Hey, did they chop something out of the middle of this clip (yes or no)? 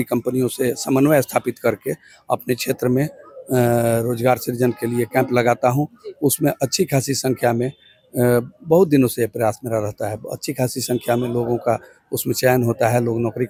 no